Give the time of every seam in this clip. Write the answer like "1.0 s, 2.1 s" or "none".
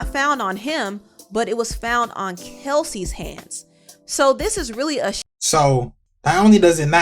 5.3 s, 6.0 s